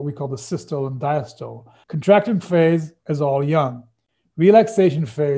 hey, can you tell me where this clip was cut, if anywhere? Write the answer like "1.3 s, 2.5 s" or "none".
1.8 s